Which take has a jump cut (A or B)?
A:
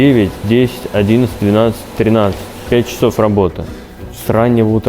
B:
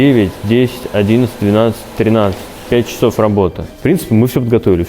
B